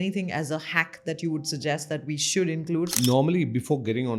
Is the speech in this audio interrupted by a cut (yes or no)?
yes